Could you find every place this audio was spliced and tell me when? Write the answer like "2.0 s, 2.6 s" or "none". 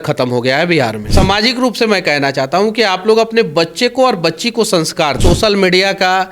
1.0 s, 5.2 s